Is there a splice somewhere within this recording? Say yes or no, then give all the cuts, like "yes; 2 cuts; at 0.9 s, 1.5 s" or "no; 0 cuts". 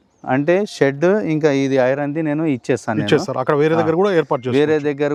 no; 0 cuts